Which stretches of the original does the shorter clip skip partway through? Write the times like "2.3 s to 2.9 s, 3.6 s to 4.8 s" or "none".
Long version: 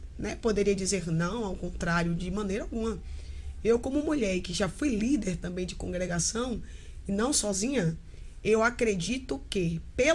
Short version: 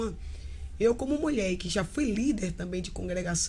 none